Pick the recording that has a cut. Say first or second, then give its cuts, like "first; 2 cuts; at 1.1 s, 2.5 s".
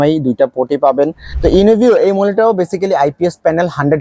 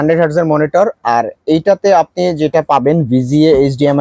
first; 1 cut; at 1.2 s